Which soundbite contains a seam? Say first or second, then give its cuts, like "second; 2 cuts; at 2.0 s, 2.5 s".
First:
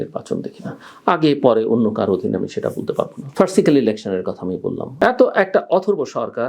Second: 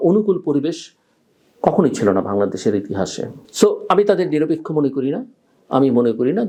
first; 1 cut; at 4.9 s